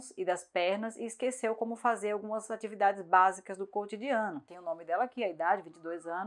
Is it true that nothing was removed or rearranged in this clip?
yes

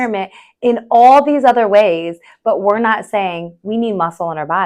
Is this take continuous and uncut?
yes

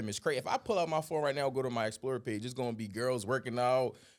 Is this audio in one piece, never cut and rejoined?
yes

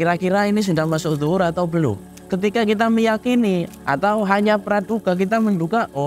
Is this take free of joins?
no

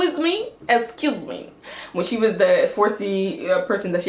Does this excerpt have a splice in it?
no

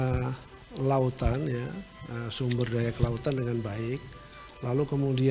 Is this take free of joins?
yes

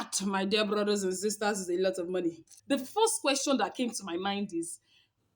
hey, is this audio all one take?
no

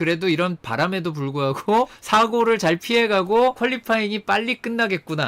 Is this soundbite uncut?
no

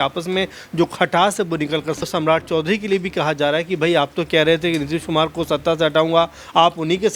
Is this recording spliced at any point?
yes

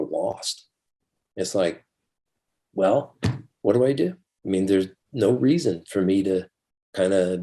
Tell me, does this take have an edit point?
no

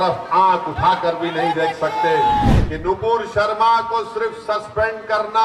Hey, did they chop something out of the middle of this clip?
yes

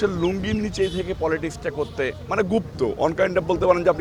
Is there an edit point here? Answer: no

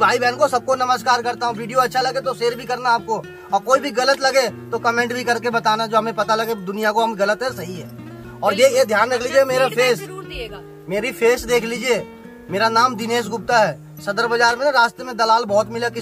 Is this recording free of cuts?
yes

